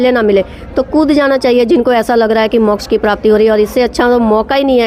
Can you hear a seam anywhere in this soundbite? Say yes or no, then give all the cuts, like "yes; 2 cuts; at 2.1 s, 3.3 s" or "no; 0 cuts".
no; 0 cuts